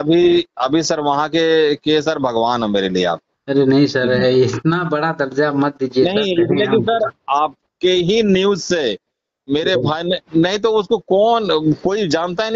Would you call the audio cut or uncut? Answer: uncut